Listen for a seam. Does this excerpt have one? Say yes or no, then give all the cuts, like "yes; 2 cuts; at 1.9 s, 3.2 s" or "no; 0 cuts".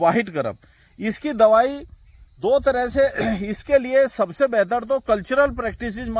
no; 0 cuts